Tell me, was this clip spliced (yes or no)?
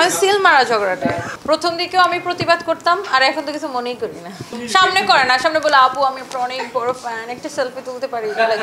no